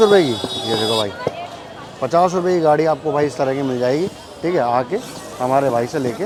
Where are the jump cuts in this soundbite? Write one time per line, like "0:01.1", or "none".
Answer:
none